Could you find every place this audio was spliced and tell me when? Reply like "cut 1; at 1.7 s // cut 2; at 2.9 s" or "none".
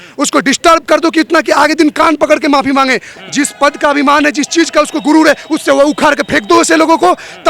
cut 1; at 3.2 s